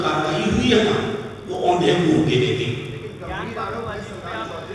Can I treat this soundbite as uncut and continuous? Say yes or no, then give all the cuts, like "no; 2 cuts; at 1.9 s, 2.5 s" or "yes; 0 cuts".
yes; 0 cuts